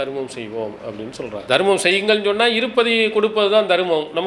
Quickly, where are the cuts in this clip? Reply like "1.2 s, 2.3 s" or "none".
1.4 s